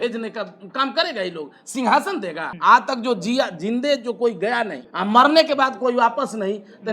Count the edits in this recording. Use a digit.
2